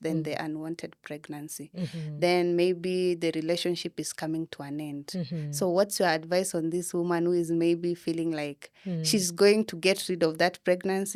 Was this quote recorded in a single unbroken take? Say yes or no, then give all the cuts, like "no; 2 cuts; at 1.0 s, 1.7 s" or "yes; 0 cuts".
yes; 0 cuts